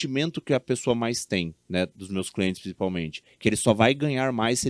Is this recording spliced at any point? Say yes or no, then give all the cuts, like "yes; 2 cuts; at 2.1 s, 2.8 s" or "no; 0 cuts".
no; 0 cuts